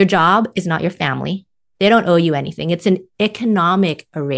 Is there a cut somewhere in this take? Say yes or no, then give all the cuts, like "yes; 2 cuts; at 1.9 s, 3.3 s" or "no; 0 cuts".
no; 0 cuts